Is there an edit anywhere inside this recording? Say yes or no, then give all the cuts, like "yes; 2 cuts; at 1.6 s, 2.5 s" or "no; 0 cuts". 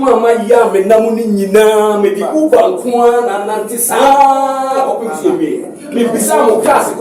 no; 0 cuts